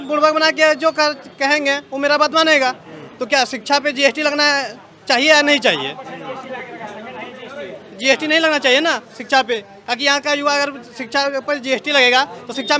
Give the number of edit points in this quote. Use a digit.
0